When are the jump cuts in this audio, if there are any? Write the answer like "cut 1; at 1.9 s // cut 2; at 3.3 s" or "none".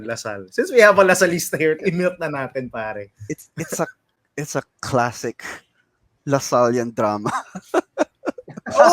cut 1; at 1.8 s